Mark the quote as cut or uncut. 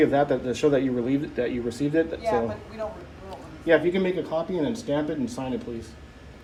uncut